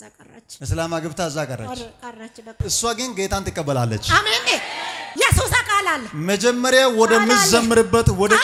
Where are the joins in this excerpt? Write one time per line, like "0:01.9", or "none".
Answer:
none